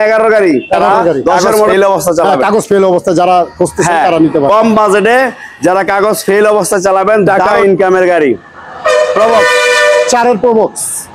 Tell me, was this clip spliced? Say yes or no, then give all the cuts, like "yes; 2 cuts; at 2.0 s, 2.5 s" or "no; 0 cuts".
yes; 2 cuts; at 1.7 s, 7.2 s